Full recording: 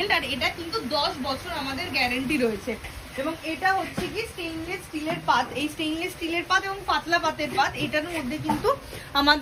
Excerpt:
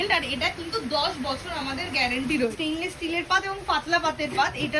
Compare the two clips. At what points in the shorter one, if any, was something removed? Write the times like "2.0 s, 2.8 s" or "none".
2.6 s